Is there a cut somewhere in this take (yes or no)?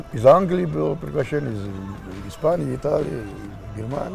no